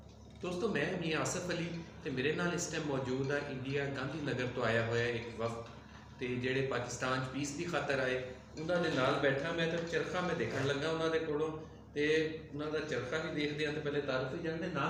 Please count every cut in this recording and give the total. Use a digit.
0